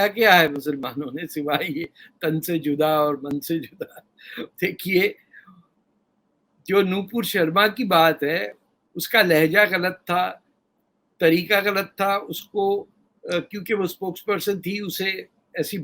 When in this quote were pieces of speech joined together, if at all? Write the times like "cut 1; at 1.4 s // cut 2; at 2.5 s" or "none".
none